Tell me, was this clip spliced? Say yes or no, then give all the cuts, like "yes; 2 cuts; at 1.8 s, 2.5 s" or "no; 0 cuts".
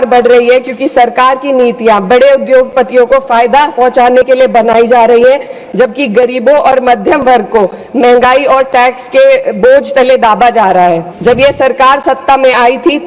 yes; 1 cut; at 11.1 s